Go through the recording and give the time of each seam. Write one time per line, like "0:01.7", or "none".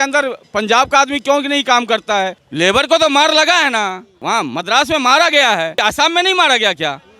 0:02.4
0:04.1
0:05.8